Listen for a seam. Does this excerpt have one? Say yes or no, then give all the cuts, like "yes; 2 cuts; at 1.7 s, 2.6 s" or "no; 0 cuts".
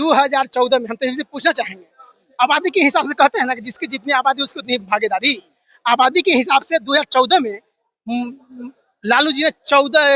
no; 0 cuts